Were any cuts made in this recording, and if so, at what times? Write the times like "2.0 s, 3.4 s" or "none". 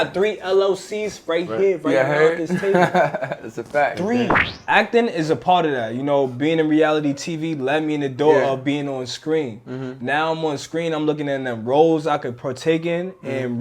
4.5 s